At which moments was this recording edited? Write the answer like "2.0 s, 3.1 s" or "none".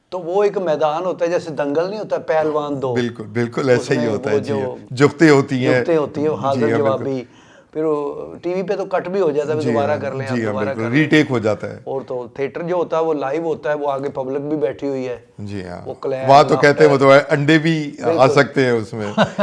none